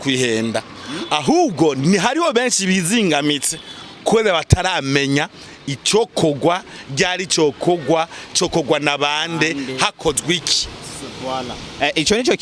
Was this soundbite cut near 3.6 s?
no; 0 cuts

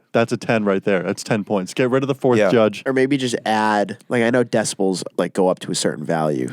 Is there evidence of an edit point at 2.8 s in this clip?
yes; 1 cut; at 2.8 s

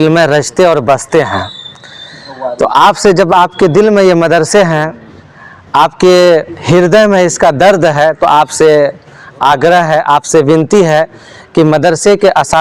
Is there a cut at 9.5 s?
no; 0 cuts

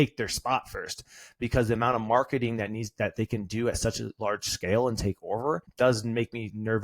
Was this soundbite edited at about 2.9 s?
no; 1 cut; at 5.7 s

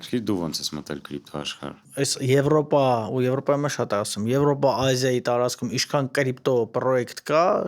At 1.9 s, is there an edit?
yes; 1 cut; at 1.9 s

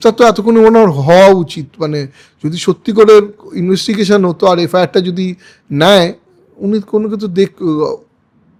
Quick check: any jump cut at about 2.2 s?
no; 0 cuts

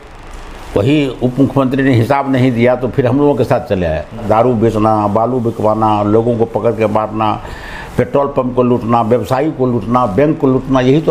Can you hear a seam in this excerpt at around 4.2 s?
yes; 1 cut; at 4.2 s

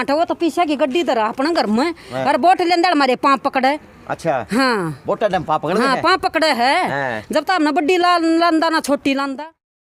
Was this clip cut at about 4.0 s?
no; 0 cuts

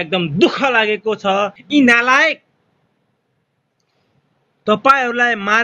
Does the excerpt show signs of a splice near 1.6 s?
yes; 1 cut; at 1.6 s

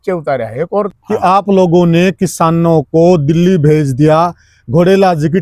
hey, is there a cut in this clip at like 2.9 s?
no; 1 cut; at 1.0 s

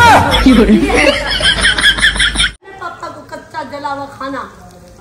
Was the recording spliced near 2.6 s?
yes; 1 cut; at 2.6 s

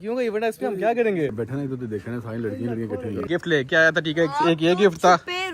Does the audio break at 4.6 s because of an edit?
no; 2 cuts; at 1.3 s, 3.2 s

